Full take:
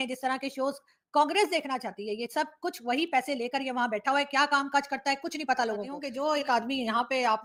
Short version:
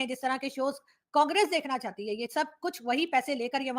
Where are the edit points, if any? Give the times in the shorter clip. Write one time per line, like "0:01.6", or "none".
none

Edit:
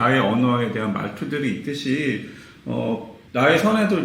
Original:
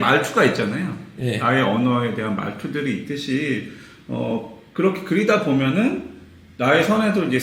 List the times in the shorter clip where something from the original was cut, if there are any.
0:03.1

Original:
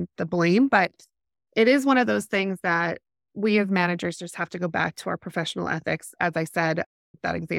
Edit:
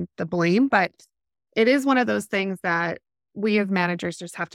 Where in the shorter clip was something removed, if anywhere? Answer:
none

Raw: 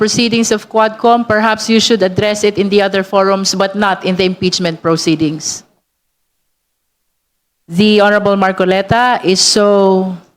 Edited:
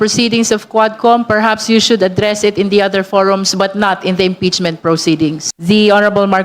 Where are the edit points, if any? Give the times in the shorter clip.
0:05.5

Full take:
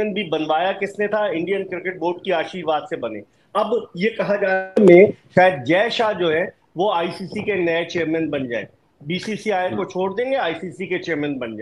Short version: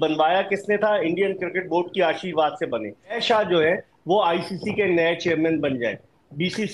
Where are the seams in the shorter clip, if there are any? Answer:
0:03.2

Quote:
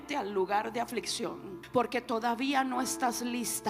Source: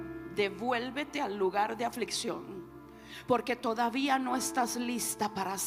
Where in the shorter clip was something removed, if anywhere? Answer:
0:01.5

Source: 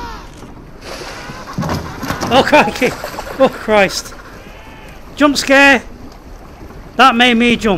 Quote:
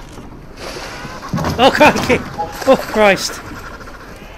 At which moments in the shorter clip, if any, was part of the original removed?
0:01.6

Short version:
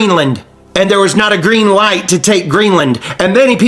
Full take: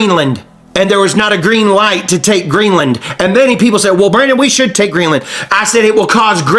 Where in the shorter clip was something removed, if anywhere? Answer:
none

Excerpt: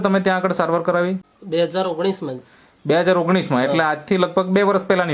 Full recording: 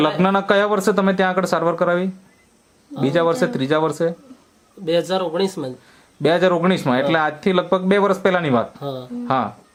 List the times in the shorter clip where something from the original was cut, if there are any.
0:01.3

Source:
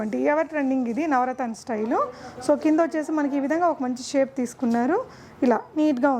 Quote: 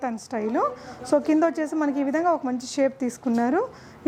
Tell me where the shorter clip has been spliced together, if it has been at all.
none

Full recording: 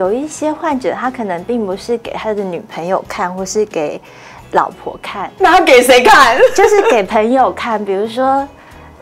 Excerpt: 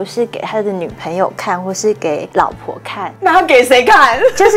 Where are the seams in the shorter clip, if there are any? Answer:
0:02.3

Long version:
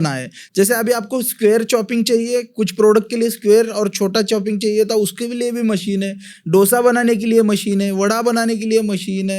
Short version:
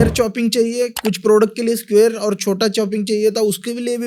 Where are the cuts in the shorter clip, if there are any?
none

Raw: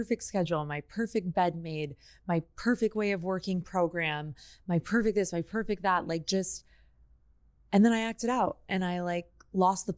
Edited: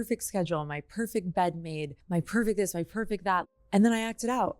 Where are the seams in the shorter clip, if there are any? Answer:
0:01.9
0:03.5

